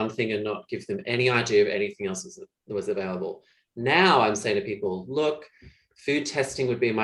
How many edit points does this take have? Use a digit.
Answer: 0